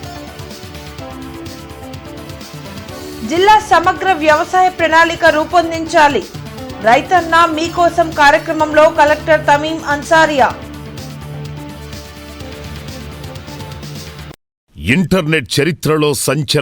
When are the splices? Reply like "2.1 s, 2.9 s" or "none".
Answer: 14.7 s